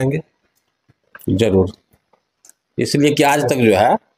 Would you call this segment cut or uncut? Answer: uncut